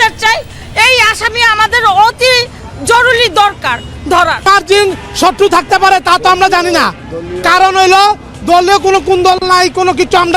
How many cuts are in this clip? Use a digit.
1